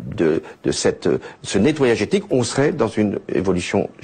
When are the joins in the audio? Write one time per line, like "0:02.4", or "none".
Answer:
0:01.4